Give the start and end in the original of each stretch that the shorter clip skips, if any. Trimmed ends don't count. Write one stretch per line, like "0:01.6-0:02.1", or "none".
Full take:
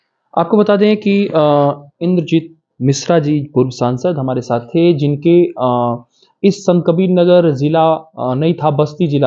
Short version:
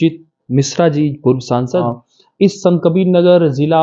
0:04.2-0:05.9